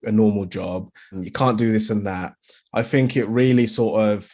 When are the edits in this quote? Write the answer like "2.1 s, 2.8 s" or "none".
1.2 s